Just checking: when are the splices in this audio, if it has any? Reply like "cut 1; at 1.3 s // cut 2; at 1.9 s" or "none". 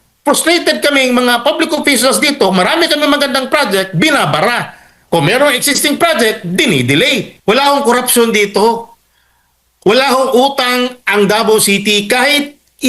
cut 1; at 7.3 s